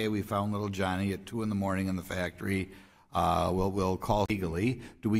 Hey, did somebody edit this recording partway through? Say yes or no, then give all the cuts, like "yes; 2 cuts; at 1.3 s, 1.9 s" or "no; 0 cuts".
no; 0 cuts